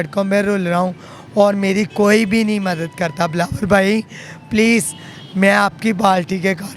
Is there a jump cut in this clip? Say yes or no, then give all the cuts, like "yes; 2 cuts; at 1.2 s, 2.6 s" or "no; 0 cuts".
no; 0 cuts